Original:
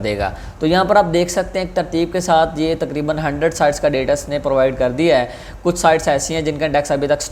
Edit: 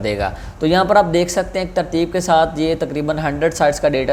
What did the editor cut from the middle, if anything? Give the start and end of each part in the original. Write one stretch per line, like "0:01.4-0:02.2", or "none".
none